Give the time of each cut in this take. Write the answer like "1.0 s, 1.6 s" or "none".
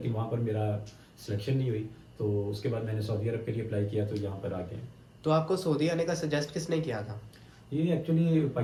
none